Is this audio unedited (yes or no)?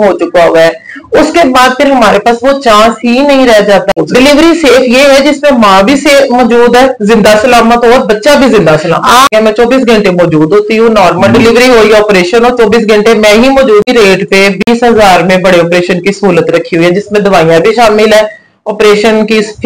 no